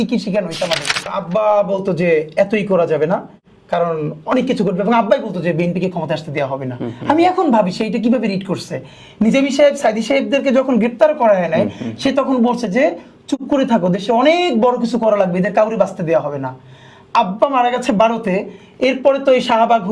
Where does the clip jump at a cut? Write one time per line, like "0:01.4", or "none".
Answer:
0:01.1